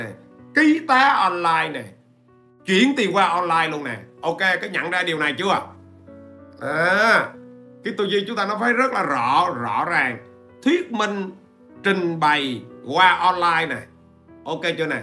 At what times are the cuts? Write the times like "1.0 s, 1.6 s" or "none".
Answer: none